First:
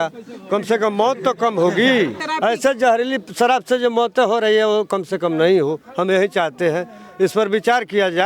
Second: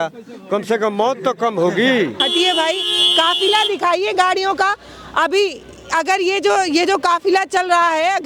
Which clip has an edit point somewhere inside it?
second; 1 cut; at 2.2 s

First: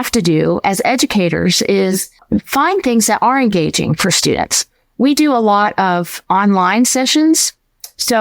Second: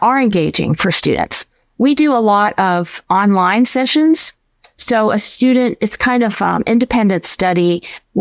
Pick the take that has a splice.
first; 1 cut; at 2.1 s

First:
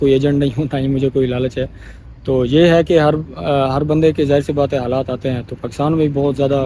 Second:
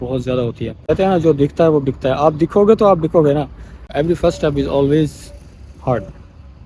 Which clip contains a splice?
second; 2 cuts; at 0.8 s, 3.9 s

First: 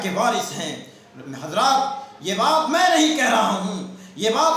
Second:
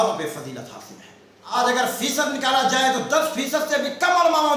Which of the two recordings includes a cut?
second; 1 cut; at 1.5 s

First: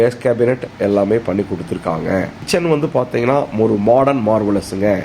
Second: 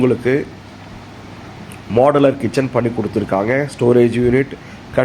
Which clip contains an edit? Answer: first; 1 cut; at 2.5 s

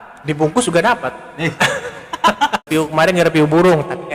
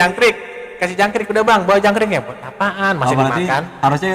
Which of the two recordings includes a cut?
first; 1 cut; at 2.7 s

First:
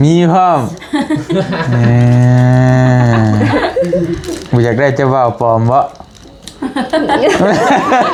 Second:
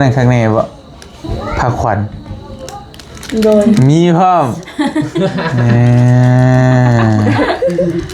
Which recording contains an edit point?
second; 1 cut; at 1.2 s

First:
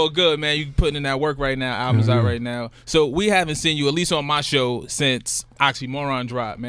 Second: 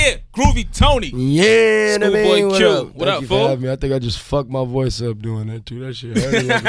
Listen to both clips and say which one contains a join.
second; 1 cut; at 2.9 s

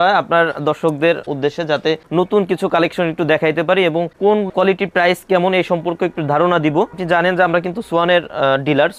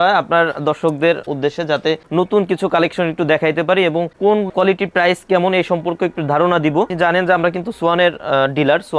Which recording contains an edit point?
second; 1 cut; at 6.9 s

